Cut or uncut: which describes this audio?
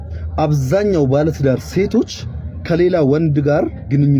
uncut